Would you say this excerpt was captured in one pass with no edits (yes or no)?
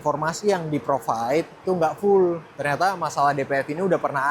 no